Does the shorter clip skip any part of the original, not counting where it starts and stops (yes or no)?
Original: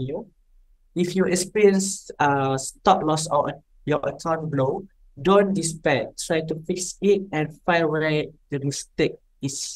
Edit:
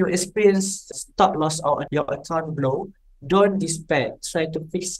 yes